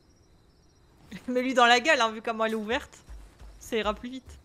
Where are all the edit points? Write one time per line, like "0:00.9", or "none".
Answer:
none